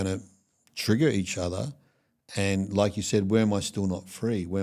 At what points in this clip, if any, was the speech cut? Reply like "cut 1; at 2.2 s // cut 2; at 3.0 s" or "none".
none